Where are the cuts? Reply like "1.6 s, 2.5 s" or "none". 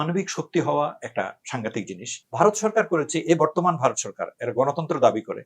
2.2 s

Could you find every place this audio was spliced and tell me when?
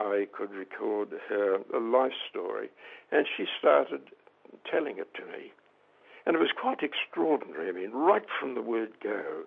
none

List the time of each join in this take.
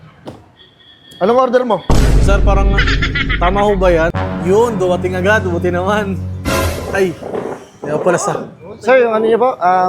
4.1 s

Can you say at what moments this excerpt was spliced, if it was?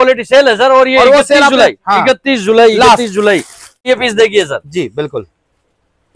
3.8 s

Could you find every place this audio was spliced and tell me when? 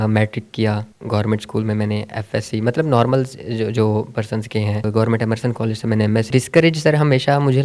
0.9 s, 4.8 s, 6.3 s

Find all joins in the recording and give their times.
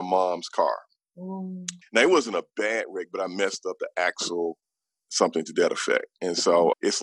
none

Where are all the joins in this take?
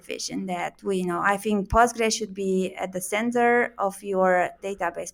none

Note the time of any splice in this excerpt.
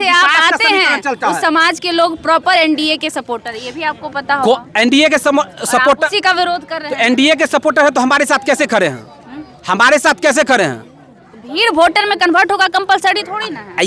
none

